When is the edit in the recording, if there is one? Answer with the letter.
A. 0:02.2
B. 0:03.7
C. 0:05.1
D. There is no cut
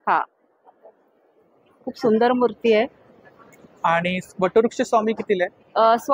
D